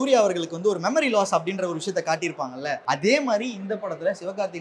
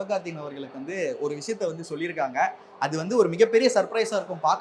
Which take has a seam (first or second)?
first